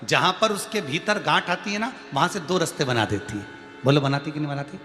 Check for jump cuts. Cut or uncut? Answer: uncut